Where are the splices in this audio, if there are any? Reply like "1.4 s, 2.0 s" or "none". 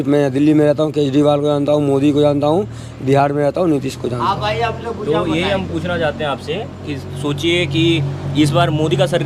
none